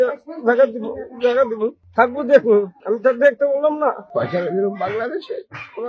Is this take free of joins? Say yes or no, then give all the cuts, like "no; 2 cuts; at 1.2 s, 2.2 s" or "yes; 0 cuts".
no; 3 cuts; at 1.8 s, 2.8 s, 4.0 s